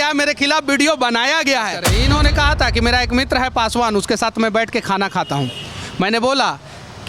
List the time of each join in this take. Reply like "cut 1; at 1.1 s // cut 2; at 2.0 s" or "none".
cut 1; at 1.9 s